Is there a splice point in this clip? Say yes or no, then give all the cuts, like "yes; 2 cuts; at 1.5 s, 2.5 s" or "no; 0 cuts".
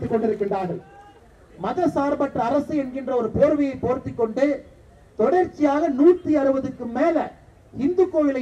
yes; 1 cut; at 1.1 s